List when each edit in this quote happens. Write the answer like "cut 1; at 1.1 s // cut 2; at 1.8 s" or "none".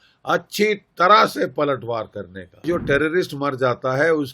cut 1; at 2.7 s